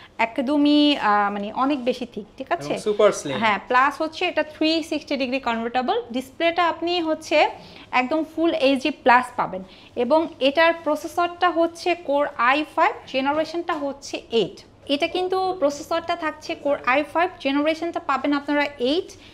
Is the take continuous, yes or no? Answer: yes